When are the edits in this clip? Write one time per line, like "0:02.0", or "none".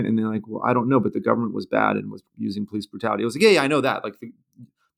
0:02.2